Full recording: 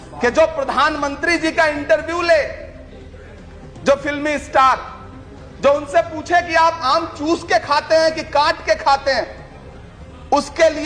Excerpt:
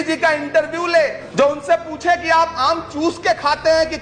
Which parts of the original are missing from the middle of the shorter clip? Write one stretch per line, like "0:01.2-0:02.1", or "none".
0:02.6-0:05.5